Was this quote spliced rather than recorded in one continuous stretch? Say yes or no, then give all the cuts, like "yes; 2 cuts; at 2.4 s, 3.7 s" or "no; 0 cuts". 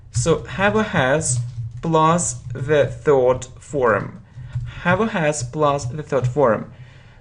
yes; 1 cut; at 3.5 s